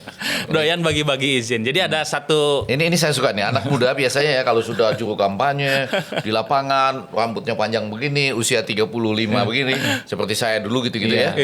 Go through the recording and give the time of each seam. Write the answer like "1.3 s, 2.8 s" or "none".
none